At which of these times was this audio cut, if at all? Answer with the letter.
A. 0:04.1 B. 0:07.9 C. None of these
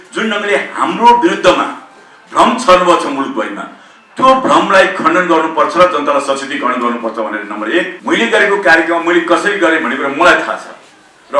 B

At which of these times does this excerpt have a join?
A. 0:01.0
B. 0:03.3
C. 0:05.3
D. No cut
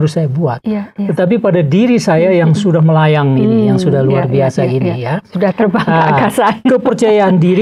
D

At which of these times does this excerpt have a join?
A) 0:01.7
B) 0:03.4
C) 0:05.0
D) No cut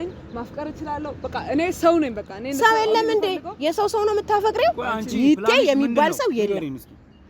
C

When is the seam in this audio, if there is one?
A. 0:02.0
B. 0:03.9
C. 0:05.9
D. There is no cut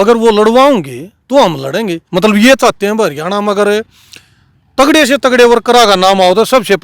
A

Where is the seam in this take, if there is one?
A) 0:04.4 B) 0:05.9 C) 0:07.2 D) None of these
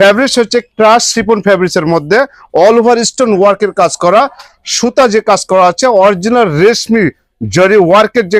D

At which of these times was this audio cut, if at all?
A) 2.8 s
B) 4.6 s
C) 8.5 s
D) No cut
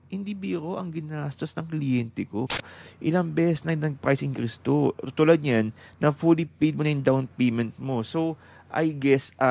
A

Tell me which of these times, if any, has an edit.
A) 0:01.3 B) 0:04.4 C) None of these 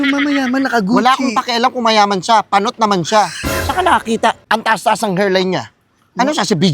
B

